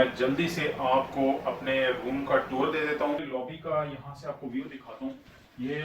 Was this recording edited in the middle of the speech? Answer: yes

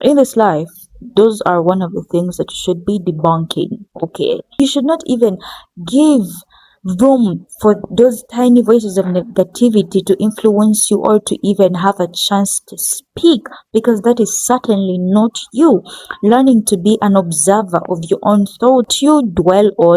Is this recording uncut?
no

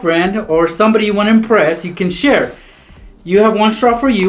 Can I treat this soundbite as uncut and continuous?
yes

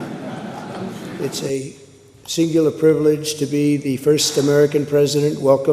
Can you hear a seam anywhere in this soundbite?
yes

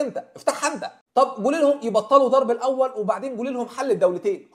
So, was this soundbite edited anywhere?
yes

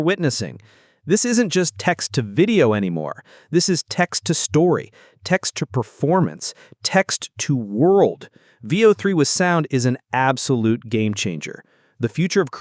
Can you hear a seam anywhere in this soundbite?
no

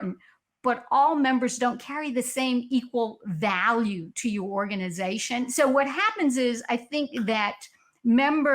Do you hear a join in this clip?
yes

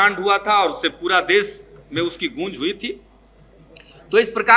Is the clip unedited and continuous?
yes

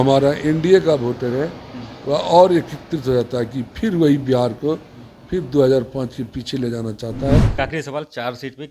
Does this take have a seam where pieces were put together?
yes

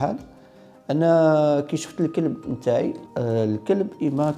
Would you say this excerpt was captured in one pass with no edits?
no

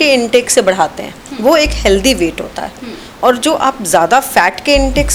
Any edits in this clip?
no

